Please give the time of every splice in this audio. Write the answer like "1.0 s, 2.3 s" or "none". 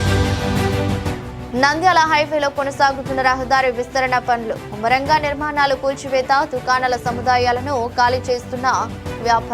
none